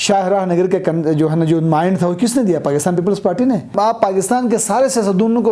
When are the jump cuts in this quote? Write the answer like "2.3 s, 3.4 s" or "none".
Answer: 3.7 s